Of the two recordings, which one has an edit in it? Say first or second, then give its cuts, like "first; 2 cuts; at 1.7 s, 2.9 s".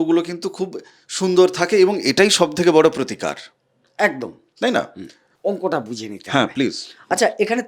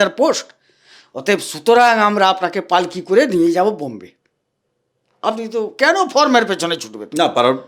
first; 1 cut; at 5.3 s